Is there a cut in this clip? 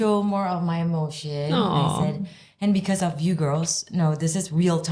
no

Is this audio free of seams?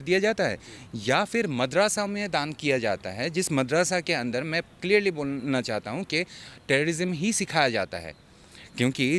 yes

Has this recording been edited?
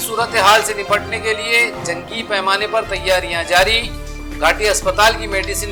no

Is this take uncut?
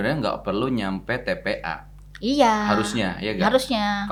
yes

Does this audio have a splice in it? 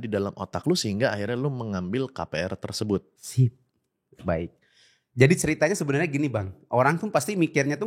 no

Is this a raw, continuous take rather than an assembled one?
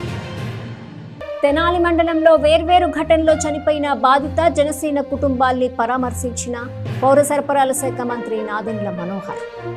yes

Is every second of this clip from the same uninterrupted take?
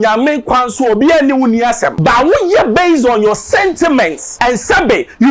no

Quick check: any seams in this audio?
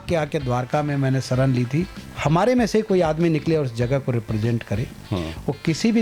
yes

